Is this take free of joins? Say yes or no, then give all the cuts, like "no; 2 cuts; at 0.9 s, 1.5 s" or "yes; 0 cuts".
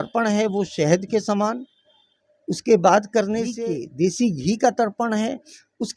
no; 1 cut; at 3.6 s